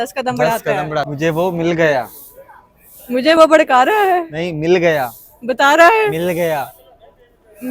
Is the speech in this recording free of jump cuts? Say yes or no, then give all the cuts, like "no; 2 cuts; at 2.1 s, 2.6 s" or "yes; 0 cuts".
no; 1 cut; at 1.1 s